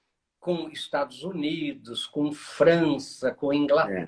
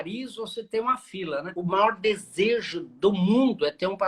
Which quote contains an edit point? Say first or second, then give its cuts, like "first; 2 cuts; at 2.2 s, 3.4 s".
second; 1 cut; at 1.5 s